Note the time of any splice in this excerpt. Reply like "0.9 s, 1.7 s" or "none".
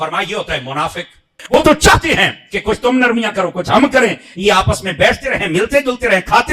1.4 s